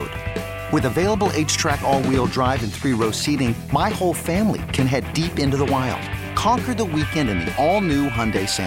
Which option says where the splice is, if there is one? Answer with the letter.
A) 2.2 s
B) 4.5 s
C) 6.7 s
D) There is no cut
D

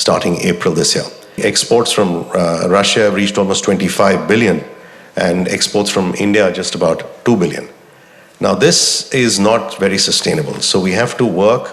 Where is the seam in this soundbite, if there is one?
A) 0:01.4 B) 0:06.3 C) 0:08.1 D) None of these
A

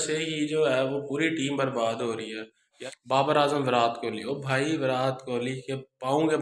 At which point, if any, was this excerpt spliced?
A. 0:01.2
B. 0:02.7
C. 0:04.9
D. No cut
B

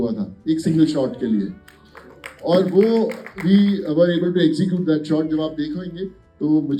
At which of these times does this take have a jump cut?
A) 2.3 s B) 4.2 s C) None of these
C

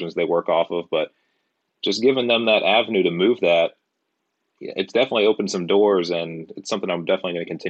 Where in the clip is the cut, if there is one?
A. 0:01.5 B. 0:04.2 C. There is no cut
C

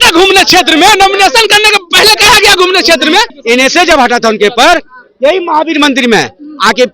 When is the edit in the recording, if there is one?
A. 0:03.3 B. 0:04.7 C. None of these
A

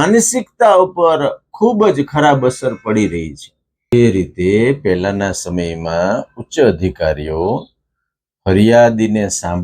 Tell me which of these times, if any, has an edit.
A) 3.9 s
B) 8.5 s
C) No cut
A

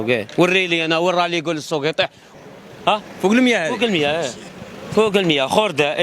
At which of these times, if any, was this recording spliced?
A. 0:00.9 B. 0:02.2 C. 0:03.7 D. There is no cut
B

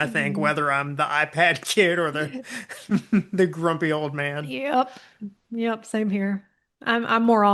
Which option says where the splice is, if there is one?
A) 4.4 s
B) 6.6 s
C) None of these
A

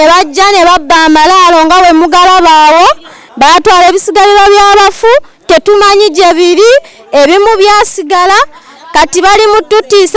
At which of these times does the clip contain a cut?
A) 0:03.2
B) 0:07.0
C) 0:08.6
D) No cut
A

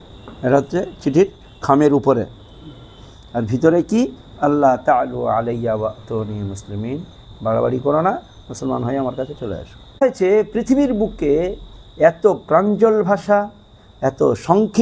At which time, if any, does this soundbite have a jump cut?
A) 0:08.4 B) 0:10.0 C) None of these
B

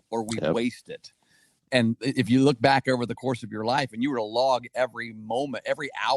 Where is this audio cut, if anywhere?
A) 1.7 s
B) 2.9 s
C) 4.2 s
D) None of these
A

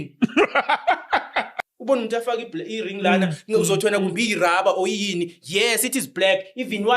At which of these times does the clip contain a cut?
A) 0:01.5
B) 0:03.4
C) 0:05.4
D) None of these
A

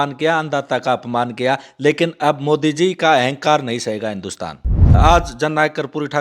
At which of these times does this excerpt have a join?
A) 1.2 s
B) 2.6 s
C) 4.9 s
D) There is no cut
C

